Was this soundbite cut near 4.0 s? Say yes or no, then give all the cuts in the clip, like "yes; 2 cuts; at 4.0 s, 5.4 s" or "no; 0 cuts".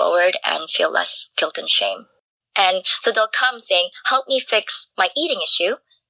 no; 1 cut; at 2.3 s